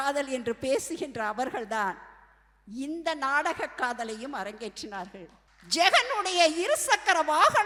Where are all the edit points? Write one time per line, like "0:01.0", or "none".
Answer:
none